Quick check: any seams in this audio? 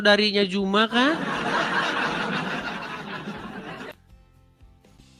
no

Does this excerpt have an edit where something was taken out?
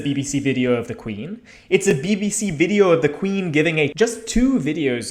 yes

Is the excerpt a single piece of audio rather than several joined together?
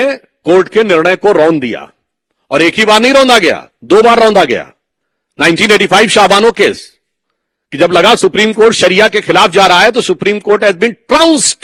yes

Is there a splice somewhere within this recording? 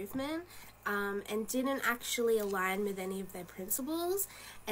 yes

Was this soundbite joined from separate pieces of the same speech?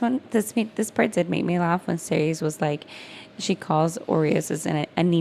no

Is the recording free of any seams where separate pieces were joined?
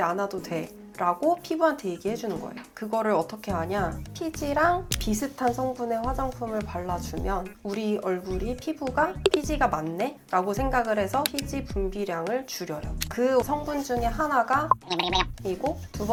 yes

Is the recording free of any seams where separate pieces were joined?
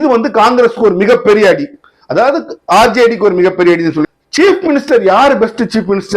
no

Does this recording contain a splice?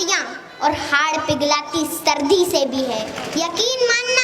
yes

